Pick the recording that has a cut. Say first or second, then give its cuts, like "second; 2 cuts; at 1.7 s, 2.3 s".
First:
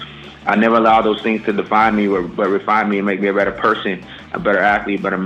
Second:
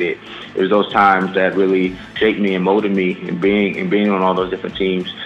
second; 1 cut; at 2.1 s